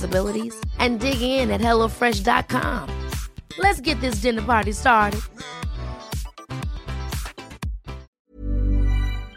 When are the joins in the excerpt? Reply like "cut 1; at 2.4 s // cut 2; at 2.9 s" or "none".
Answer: cut 1; at 8.0 s